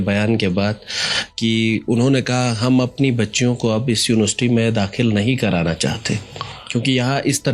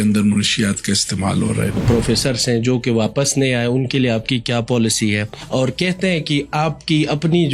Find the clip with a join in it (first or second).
second